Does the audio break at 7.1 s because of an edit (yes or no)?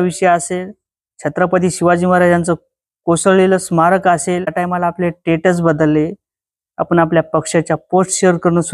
no